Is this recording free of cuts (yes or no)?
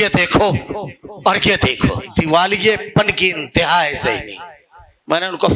no